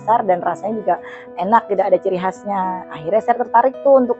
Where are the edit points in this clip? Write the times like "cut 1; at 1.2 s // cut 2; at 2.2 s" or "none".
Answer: none